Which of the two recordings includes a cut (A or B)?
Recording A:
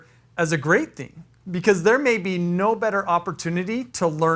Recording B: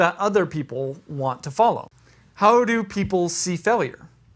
B